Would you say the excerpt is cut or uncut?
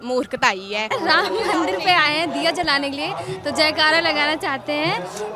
cut